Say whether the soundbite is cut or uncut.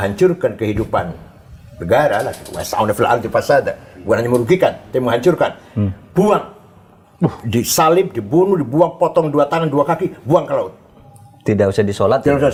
uncut